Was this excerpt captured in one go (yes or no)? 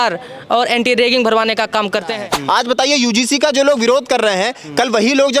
no